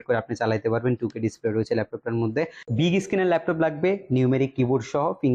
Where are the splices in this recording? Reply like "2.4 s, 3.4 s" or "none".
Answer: 2.6 s